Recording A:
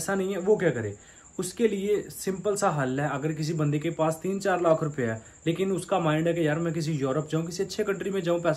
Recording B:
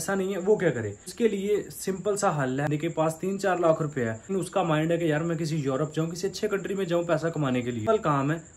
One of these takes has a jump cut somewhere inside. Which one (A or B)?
B